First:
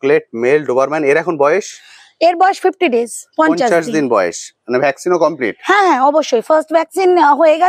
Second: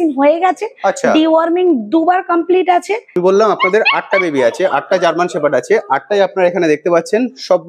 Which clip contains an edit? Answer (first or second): second